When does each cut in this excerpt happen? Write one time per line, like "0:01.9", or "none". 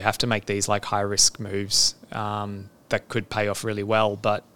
none